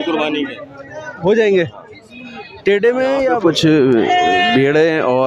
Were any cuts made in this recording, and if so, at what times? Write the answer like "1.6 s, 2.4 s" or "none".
3.4 s